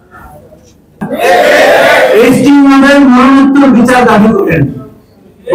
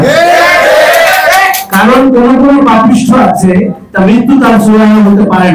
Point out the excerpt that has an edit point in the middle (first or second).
first